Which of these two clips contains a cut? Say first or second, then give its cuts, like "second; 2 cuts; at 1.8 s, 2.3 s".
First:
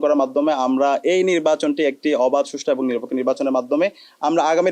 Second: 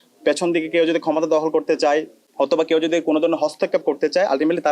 second; 1 cut; at 2.2 s